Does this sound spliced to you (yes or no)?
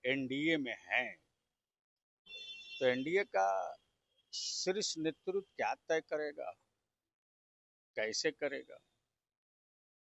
no